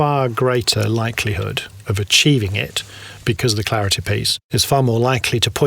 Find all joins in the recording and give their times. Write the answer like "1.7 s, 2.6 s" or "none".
3.4 s, 4.4 s

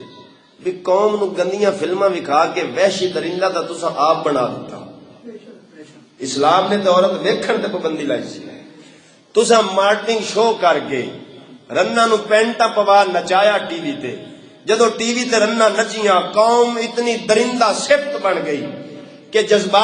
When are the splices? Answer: none

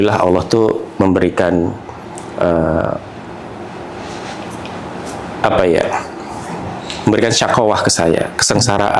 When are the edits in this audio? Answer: none

